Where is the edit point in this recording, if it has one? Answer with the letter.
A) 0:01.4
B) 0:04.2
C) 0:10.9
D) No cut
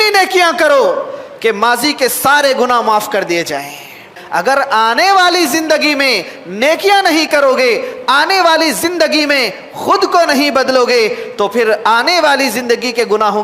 B